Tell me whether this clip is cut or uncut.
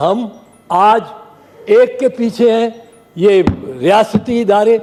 uncut